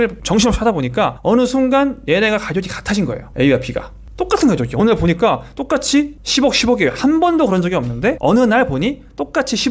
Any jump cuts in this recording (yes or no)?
no